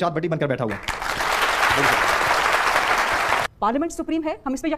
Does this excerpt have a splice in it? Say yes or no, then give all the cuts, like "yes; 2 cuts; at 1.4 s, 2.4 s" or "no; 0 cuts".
yes; 1 cut; at 3.5 s